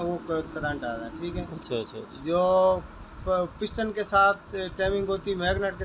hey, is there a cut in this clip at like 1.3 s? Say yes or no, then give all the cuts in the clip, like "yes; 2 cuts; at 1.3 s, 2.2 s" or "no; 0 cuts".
no; 0 cuts